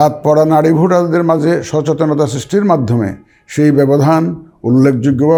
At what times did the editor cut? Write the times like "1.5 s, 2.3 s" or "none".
none